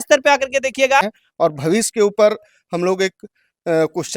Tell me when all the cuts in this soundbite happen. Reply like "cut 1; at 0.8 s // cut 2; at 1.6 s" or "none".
cut 1; at 1.0 s